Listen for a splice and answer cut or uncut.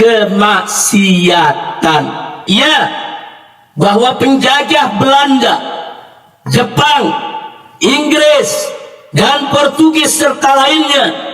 cut